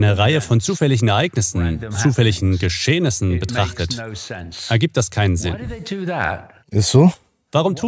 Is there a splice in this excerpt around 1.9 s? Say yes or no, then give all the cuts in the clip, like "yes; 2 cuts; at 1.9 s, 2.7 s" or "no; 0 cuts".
no; 0 cuts